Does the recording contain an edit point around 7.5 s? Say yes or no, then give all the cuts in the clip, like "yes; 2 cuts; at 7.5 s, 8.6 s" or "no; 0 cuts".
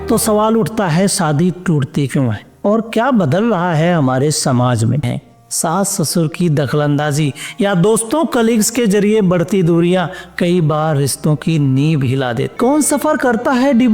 no; 2 cuts; at 5.0 s, 12.5 s